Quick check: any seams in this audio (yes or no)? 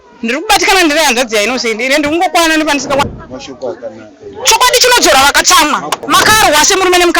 yes